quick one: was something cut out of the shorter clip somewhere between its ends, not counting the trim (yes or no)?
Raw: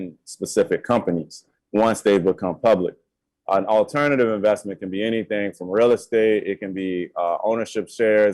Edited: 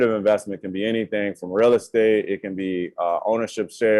no